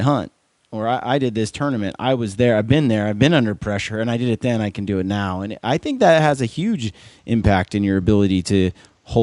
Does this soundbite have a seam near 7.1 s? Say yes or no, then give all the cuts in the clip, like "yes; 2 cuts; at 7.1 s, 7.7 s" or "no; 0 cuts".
no; 0 cuts